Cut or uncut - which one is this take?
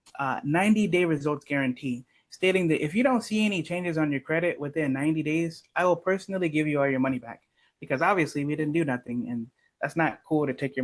uncut